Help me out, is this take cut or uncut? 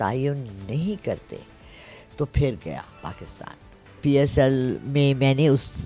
cut